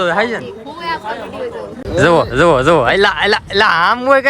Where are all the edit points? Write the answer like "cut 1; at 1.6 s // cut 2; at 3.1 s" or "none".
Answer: cut 1; at 1.9 s